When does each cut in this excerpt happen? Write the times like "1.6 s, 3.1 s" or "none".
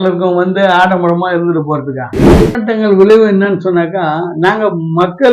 2.4 s